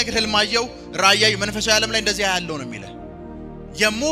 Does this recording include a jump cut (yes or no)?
no